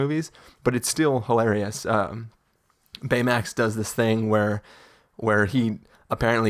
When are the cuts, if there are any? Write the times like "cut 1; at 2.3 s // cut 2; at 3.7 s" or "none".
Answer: none